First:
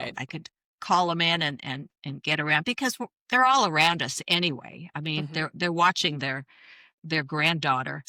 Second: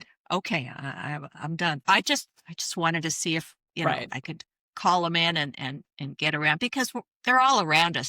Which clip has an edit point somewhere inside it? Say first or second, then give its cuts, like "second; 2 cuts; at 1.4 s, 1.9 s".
second; 1 cut; at 1.8 s